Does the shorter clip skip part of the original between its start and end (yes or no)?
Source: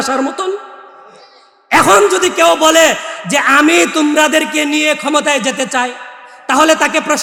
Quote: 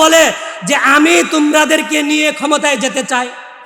no